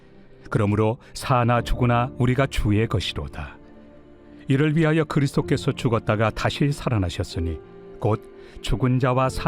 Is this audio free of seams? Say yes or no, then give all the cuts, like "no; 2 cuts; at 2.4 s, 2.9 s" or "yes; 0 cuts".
no; 1 cut; at 3.7 s